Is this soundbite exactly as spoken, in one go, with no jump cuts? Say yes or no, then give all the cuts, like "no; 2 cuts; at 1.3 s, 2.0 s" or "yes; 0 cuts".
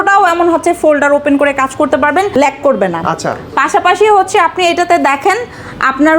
yes; 0 cuts